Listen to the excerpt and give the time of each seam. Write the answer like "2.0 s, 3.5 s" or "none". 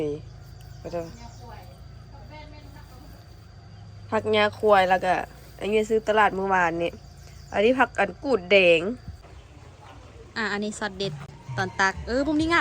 9.6 s